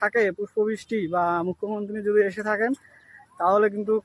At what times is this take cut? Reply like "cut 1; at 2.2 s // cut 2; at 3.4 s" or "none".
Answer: none